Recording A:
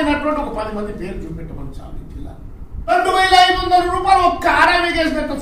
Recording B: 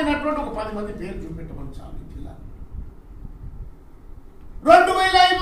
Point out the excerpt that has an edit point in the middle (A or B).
A